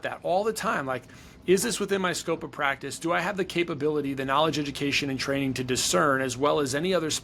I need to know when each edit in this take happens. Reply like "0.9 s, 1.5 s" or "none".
none